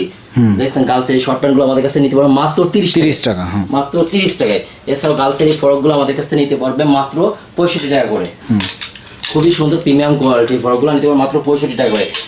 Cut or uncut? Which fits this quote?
uncut